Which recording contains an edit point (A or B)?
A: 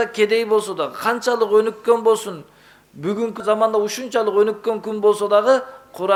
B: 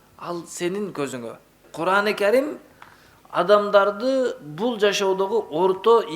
B